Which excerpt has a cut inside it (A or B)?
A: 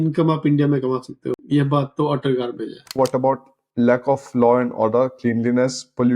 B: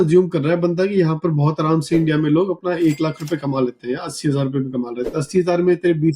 A